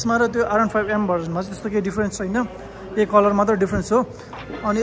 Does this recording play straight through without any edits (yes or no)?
yes